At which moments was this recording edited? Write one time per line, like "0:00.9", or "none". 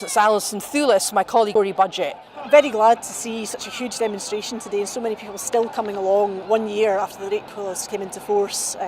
0:01.5